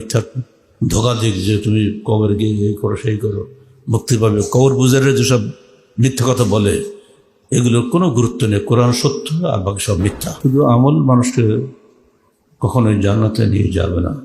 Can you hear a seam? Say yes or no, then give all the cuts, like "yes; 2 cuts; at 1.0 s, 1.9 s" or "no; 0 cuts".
yes; 1 cut; at 10.3 s